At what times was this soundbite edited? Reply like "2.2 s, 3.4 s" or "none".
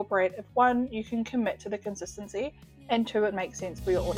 none